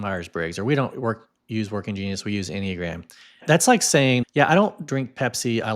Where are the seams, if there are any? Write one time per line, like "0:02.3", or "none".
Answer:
0:03.4
0:04.2